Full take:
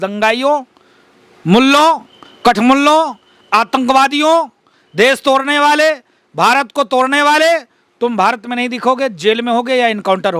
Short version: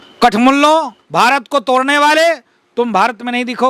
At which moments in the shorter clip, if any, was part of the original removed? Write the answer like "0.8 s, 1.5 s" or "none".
1.0 s

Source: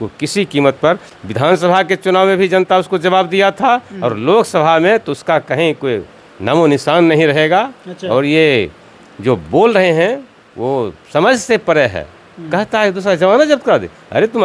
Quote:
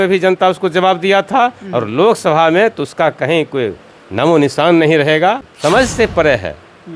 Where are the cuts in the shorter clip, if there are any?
5.5 s

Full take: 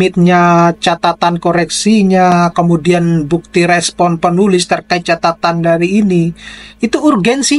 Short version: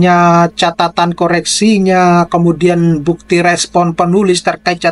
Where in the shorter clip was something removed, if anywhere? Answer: none

